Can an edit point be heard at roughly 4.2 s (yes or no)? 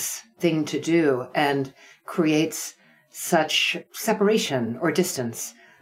no